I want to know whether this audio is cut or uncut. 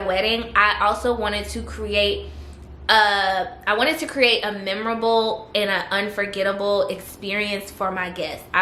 uncut